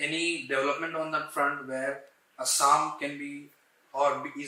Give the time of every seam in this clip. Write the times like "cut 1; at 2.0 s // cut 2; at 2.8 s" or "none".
none